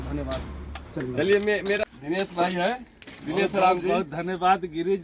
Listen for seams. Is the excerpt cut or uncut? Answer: cut